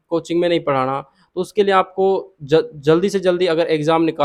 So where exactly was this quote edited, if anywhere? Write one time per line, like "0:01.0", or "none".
none